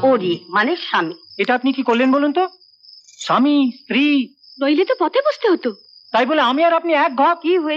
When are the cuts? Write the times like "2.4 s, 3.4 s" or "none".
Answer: 1.2 s